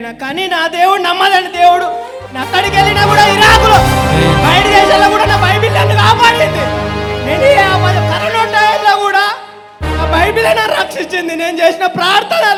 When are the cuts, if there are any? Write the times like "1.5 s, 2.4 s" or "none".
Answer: none